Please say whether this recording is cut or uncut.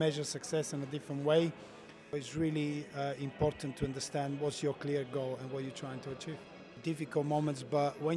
cut